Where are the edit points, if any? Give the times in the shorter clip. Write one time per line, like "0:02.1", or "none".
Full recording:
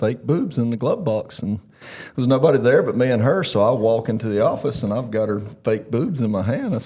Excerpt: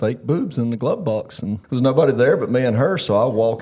0:01.6